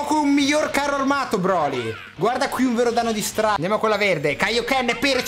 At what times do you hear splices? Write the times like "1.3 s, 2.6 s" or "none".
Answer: 3.6 s